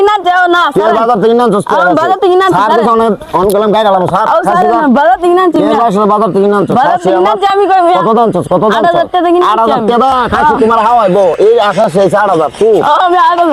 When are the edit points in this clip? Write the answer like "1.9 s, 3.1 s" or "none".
none